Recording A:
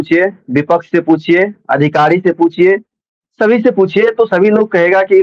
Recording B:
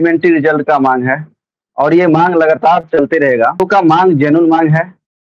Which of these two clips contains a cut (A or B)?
B